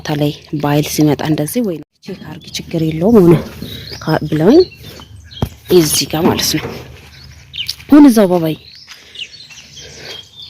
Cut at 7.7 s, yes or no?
no